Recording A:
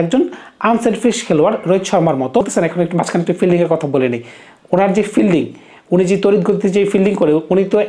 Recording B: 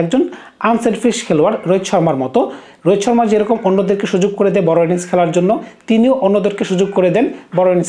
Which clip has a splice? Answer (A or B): A